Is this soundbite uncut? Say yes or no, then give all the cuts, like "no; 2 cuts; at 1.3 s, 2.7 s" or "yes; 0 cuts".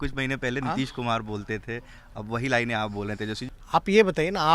no; 1 cut; at 3.5 s